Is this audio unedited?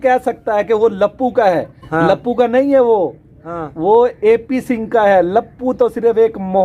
yes; 0 cuts

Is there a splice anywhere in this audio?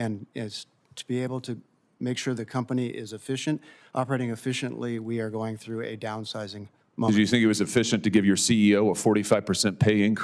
no; 0 cuts

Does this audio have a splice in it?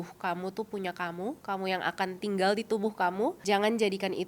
yes; 3 cuts; at 1.4 s, 2.2 s, 3.4 s

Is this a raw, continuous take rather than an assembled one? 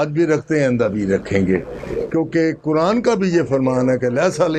yes; 0 cuts

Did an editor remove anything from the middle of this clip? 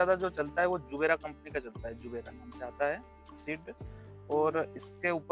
no; 0 cuts

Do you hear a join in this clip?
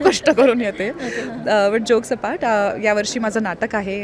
no; 0 cuts

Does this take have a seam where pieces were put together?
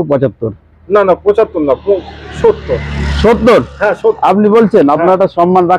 no; 0 cuts

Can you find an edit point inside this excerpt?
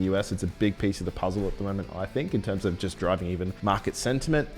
yes; 1 cut; at 3.5 s

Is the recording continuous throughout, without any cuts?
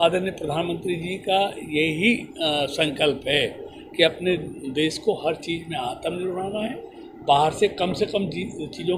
yes; 0 cuts

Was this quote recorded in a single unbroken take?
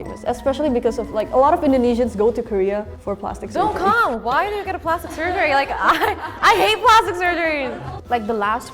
no; 1 cut; at 7.5 s

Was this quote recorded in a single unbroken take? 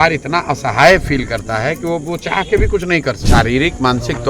no; 1 cut; at 3.2 s

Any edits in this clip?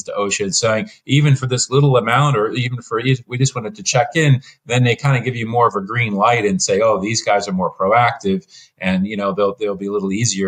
no; 0 cuts

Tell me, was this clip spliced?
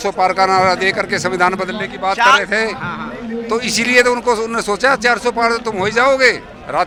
no; 0 cuts

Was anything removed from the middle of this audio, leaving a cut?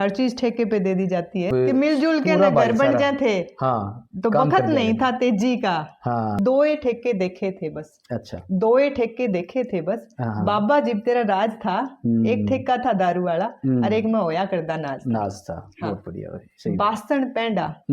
yes; 2 cuts; at 1.5 s, 6.4 s

